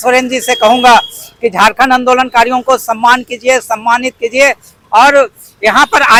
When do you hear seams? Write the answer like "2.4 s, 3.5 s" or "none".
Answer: none